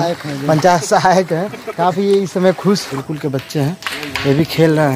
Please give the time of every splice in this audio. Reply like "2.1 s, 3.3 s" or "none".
2.9 s

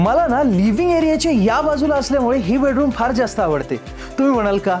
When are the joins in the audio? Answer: none

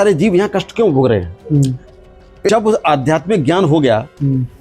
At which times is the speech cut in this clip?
2.5 s

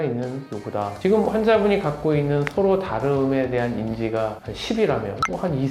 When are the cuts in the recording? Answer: 1.0 s

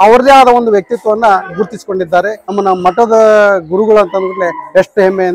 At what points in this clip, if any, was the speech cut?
2.4 s

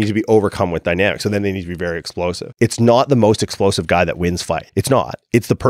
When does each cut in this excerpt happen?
2.5 s, 4.7 s

